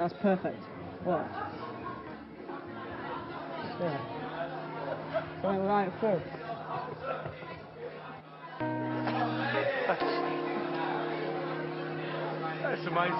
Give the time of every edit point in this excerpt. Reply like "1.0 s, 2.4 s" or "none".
0.9 s